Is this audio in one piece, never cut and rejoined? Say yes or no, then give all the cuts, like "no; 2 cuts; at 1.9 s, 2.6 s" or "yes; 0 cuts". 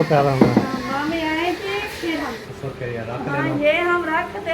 no; 1 cut; at 2.5 s